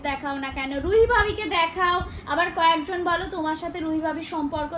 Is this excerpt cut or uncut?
uncut